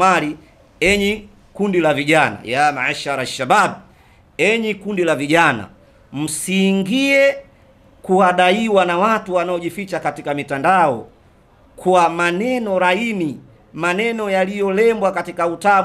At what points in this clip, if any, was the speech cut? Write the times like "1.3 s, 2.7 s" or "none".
none